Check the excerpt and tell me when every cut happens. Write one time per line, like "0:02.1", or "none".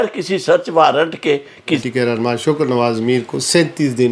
0:01.8